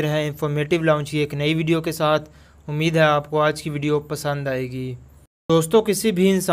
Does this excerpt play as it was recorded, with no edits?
no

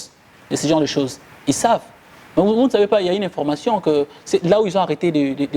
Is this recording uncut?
yes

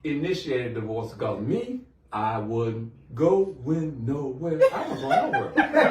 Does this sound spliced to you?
no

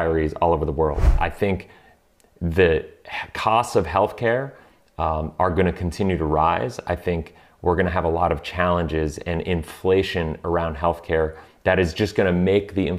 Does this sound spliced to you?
yes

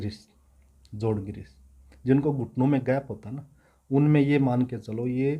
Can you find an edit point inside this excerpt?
no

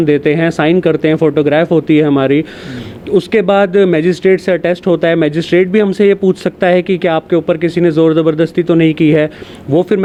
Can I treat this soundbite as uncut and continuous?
yes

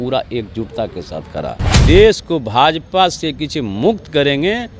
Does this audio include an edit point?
yes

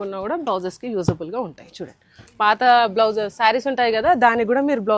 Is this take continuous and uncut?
yes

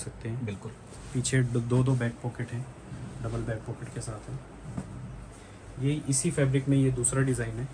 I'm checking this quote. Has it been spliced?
no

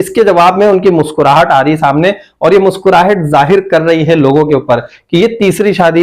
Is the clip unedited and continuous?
yes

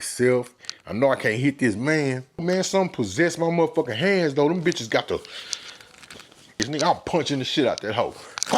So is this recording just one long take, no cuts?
no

